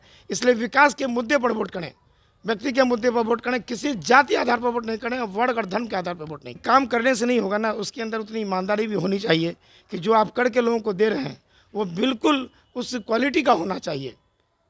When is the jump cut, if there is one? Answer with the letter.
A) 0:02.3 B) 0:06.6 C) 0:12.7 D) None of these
B